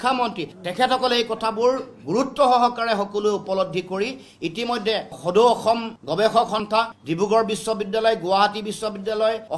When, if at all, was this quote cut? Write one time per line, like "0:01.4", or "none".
none